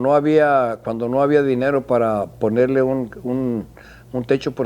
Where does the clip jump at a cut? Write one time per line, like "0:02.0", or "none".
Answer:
none